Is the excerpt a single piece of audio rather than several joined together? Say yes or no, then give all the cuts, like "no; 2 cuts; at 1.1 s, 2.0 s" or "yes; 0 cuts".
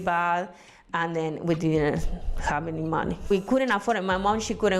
no; 1 cut; at 3.3 s